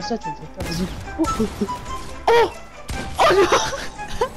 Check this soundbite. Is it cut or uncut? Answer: uncut